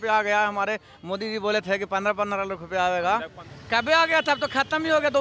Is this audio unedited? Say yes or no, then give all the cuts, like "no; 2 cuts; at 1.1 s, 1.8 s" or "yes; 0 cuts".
no; 1 cut; at 3.4 s